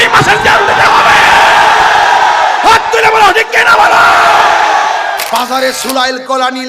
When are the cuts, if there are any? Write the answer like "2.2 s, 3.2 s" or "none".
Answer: 5.2 s